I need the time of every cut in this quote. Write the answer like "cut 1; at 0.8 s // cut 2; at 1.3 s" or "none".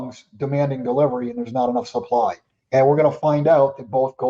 cut 1; at 2.5 s